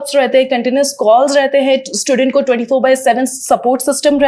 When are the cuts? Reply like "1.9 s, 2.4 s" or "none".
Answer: none